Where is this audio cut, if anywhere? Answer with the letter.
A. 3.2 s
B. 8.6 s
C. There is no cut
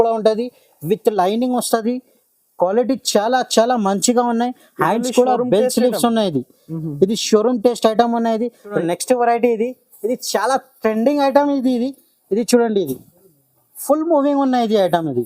B